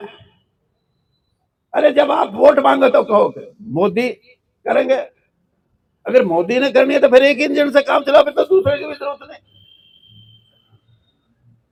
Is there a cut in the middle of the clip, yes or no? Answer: no